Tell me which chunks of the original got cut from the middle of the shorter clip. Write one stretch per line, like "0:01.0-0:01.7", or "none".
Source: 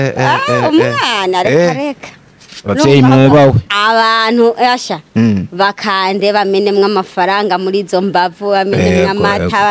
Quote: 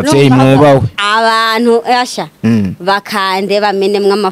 none